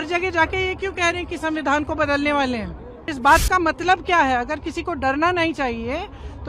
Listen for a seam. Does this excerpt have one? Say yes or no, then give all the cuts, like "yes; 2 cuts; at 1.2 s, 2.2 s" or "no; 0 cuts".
yes; 1 cut; at 3.1 s